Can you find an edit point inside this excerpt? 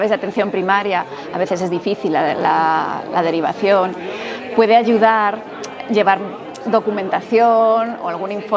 no; 0 cuts

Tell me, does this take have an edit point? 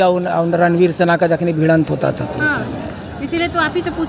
no; 0 cuts

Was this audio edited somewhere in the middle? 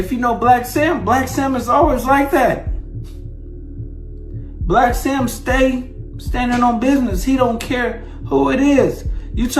yes; 2 cuts; at 2.6 s, 4.3 s

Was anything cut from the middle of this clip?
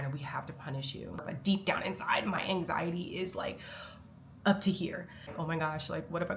yes; 2 cuts; at 1.2 s, 5.3 s

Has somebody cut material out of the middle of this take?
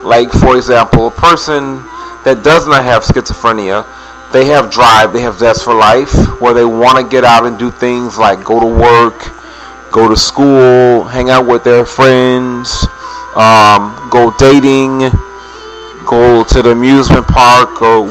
yes; 1 cut; at 16.0 s

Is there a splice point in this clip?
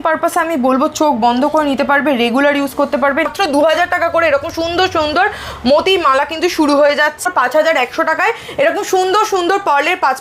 yes; 2 cuts; at 3.3 s, 7.2 s

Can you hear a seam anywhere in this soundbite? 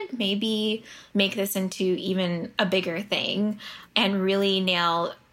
no; 0 cuts

